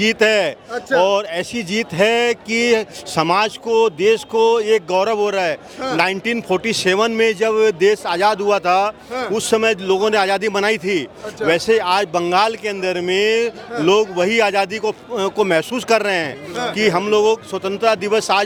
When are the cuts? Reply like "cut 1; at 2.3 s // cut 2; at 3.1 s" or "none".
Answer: none